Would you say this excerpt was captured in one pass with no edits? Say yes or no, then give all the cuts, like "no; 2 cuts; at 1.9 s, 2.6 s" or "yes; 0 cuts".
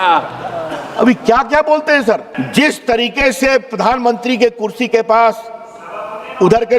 no; 1 cut; at 2.3 s